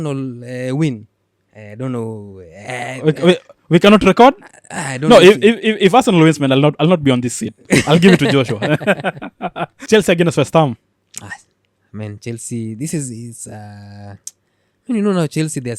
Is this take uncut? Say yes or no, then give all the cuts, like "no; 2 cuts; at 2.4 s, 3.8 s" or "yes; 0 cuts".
no; 1 cut; at 9.7 s